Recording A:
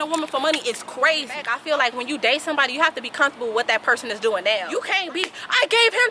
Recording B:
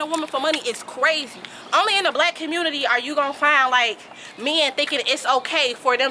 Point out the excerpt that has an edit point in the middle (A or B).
A